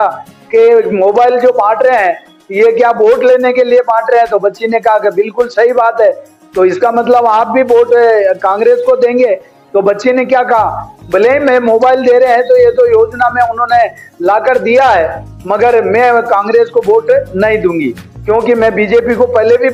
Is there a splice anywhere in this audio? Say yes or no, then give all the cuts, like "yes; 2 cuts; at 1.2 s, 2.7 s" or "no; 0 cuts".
no; 0 cuts